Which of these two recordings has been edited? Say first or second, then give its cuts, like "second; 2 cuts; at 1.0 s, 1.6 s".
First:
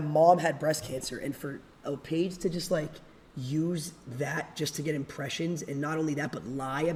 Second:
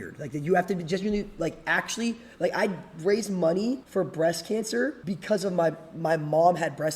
second; 2 cuts; at 3.8 s, 5.0 s